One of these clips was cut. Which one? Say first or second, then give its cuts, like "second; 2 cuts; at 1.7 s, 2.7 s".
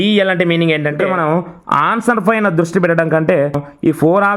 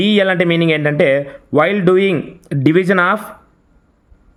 first; 2 cuts; at 1.5 s, 3.5 s